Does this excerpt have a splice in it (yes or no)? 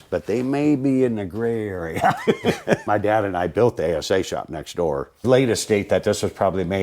yes